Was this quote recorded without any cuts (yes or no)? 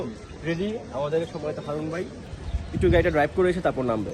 no